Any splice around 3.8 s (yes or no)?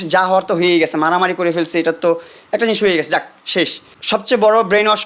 yes